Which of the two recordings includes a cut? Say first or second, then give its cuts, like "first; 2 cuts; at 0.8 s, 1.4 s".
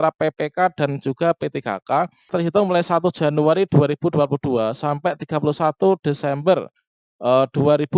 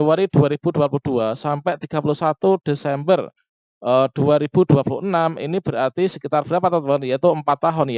first; 1 cut; at 2.3 s